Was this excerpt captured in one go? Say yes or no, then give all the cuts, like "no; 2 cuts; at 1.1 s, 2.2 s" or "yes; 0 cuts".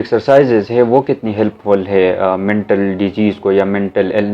yes; 0 cuts